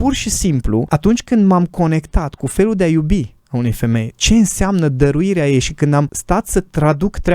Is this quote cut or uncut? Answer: cut